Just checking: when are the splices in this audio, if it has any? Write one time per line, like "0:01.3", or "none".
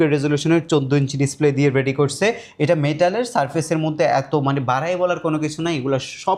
none